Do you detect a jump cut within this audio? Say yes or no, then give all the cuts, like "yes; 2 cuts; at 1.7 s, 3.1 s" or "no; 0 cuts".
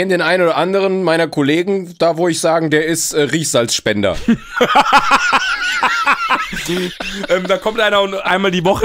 yes; 1 cut; at 6.9 s